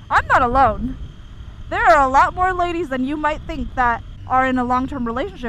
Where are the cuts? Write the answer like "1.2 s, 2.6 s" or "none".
4.1 s